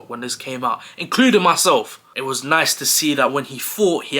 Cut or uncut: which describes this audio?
cut